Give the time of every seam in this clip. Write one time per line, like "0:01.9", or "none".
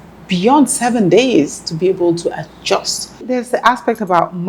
0:03.2